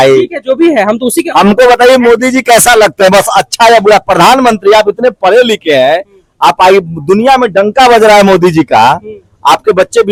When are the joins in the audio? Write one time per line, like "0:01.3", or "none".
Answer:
none